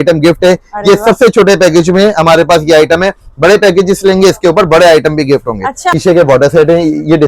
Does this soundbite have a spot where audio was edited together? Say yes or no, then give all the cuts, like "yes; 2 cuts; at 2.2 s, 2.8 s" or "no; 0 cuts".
yes; 1 cut; at 5.9 s